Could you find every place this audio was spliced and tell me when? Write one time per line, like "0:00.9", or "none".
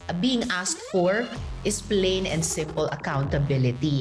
none